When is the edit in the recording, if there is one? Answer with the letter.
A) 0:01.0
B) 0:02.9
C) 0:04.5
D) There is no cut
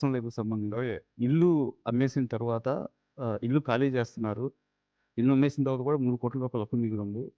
A